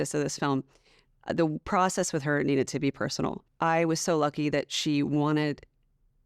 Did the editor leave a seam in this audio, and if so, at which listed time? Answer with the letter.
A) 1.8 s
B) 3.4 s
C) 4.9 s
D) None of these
B